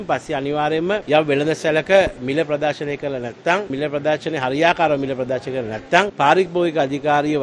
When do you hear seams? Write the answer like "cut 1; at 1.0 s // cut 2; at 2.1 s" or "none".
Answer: cut 1; at 1.0 s // cut 2; at 3.7 s // cut 3; at 6.1 s